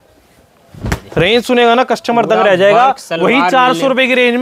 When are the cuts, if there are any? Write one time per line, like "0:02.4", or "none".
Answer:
none